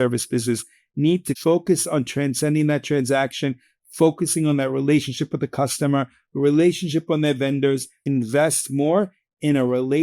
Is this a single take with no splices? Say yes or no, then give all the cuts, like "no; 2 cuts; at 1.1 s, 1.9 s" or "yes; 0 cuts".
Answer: no; 2 cuts; at 1.3 s, 8.0 s